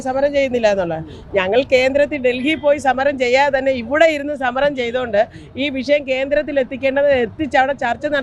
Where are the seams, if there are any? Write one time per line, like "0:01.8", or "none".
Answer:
none

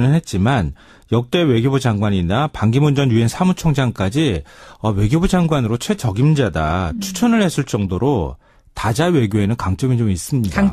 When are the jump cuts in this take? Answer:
0:06.8

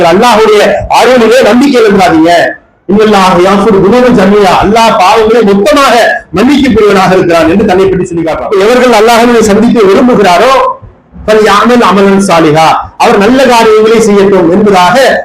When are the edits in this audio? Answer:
0:08.3

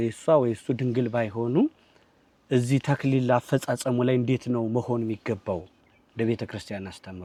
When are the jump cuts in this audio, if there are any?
none

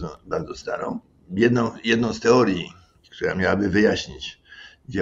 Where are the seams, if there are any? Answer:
0:01.1

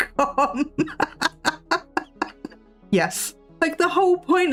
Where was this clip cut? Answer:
none

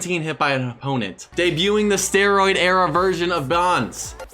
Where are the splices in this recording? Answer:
0:01.2

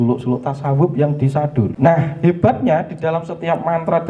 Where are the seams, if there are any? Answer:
0:01.7

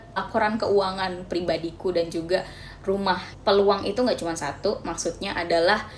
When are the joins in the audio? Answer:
0:03.3

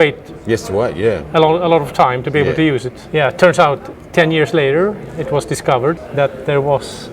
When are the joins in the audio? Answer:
0:03.0
0:03.9
0:06.0

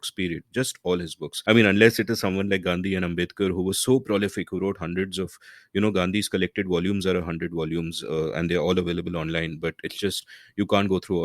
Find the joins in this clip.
0:01.2

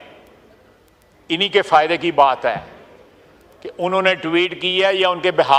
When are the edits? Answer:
none

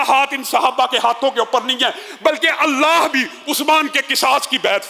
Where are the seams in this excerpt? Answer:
none

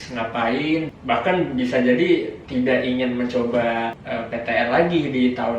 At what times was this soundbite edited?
0:00.9
0:02.4
0:04.0

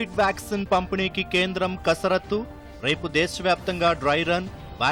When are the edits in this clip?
none

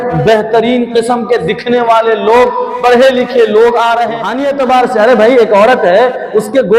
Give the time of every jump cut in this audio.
0:04.4

